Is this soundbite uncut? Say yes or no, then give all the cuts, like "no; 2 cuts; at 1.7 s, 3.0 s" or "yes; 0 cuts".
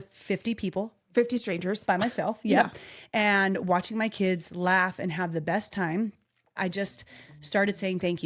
no; 1 cut; at 6.6 s